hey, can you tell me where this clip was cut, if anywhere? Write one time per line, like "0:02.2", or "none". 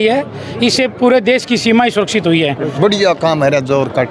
0:02.7